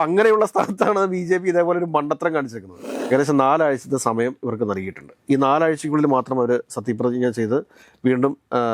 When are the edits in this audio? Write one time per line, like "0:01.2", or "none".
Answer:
0:03.0